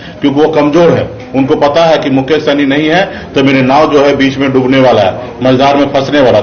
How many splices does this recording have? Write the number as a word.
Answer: zero